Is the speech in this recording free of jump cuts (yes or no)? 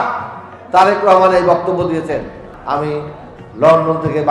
no